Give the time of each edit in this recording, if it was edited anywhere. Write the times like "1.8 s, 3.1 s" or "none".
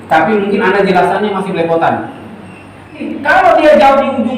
3.1 s

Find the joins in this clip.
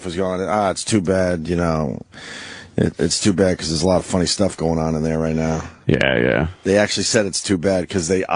5.8 s

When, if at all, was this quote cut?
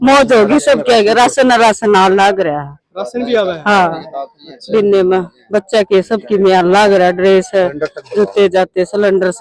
none

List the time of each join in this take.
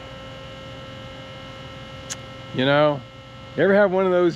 none

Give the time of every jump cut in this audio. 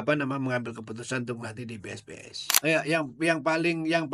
2.4 s

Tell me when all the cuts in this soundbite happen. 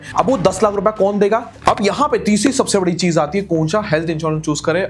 1.5 s

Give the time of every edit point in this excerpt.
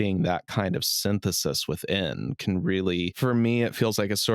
3.2 s

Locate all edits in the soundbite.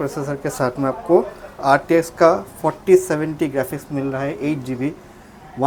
none

